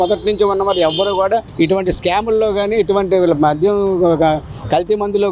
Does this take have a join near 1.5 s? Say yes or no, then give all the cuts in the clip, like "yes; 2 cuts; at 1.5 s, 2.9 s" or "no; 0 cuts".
yes; 1 cut; at 1.5 s